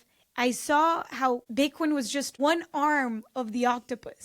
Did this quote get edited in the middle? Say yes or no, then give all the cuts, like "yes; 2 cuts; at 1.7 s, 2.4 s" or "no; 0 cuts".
yes; 2 cuts; at 1.5 s, 2.3 s